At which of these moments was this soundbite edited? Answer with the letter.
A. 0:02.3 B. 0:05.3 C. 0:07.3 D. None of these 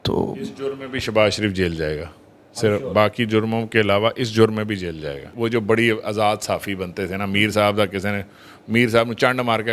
B